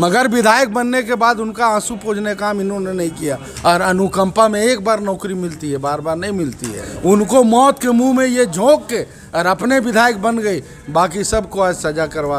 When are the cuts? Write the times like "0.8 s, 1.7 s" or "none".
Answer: 3.5 s, 6.9 s